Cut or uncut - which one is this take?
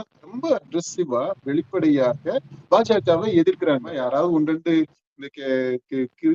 cut